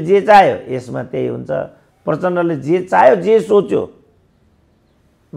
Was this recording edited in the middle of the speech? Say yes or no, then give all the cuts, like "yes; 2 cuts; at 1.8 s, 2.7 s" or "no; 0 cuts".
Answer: no; 0 cuts